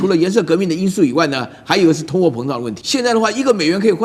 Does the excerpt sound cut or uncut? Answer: cut